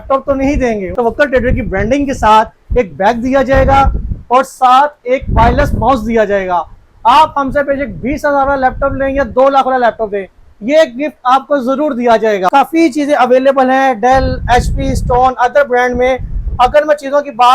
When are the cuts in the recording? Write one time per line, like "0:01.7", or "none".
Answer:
0:00.9
0:12.5